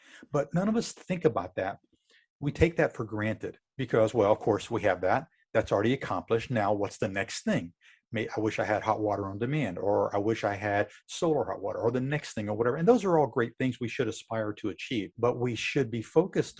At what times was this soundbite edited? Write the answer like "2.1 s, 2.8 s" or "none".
15.1 s